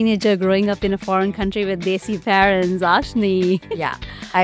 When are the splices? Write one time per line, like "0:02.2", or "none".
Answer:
none